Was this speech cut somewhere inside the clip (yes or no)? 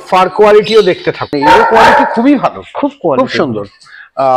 yes